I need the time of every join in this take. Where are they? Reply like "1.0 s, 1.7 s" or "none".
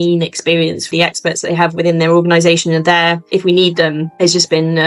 0.9 s, 3.2 s